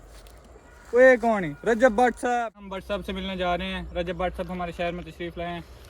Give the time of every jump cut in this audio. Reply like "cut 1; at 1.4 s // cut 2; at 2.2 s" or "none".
cut 1; at 2.4 s